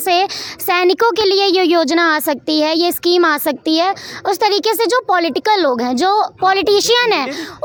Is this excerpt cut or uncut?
uncut